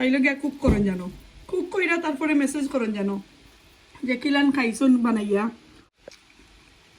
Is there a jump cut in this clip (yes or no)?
yes